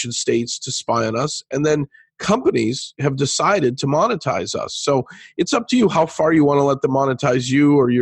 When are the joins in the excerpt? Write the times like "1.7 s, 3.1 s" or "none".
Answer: none